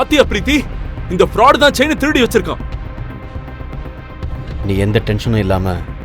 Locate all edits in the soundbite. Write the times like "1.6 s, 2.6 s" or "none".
4.5 s